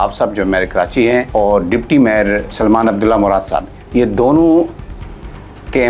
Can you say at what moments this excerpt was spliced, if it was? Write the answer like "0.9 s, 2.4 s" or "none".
1.3 s, 2.5 s